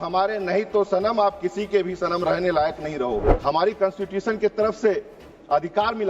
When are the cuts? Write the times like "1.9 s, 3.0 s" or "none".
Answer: 3.3 s